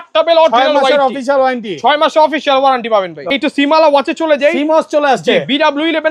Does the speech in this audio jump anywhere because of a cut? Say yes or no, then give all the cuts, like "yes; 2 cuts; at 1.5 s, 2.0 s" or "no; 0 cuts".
yes; 1 cut; at 3.4 s